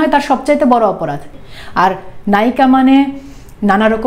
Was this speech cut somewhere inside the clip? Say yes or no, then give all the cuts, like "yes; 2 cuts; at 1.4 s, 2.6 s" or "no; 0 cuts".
yes; 1 cut; at 1.3 s